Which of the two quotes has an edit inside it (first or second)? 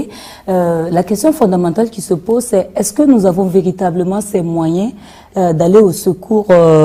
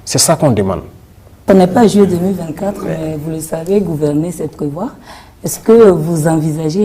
second